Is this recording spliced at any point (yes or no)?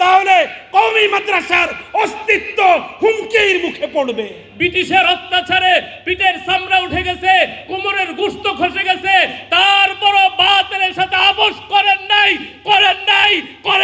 yes